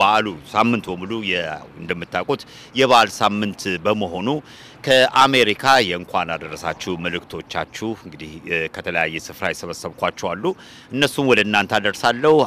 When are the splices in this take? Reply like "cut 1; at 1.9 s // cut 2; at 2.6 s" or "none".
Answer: none